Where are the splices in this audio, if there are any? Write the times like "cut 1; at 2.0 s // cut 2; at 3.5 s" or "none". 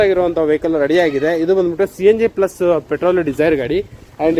none